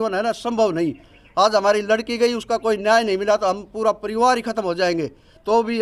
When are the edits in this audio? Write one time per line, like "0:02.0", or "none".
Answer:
none